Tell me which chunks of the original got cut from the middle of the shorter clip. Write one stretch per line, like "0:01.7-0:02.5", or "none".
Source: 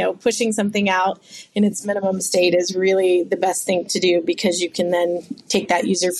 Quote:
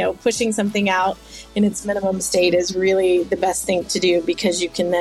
none